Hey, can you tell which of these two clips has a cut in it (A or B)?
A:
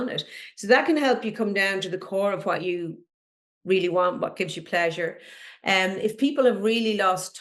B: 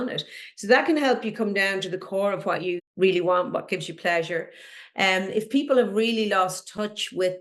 B